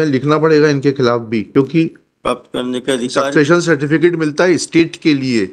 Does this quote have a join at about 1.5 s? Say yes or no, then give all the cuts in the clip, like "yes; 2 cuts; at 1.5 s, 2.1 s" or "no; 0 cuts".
yes; 1 cut; at 1.5 s